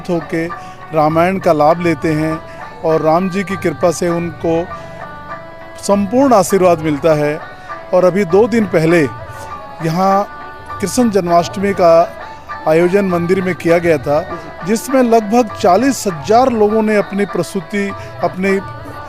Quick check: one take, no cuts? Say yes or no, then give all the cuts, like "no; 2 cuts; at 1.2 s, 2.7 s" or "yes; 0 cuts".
yes; 0 cuts